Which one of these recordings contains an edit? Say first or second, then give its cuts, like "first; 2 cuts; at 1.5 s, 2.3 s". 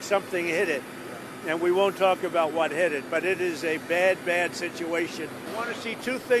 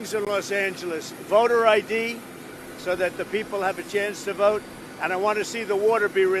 first; 1 cut; at 5.4 s